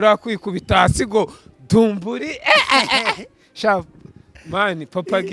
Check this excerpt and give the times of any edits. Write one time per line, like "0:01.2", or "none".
none